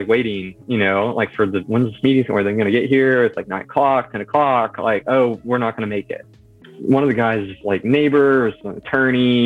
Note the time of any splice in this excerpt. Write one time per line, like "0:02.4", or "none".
0:06.7

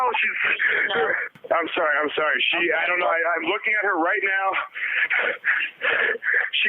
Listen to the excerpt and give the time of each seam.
0:01.3

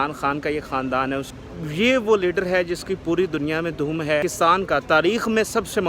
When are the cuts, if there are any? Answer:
0:01.3
0:04.2

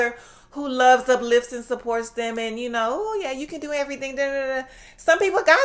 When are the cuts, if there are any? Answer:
none

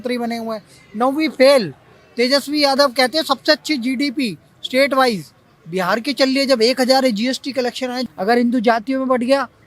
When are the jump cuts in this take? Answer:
0:08.0

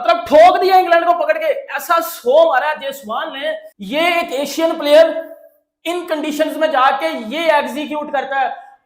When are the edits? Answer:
0:03.7

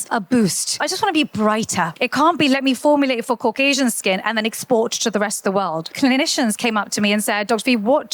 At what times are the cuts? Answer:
0:01.9
0:05.9

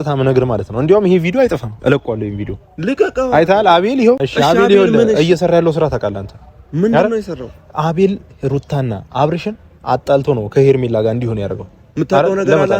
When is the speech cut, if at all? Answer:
0:04.2

